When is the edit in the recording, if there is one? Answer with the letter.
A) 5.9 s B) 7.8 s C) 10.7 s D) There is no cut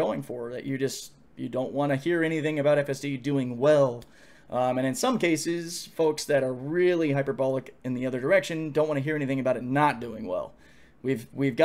D